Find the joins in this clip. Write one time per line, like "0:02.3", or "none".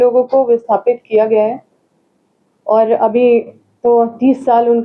none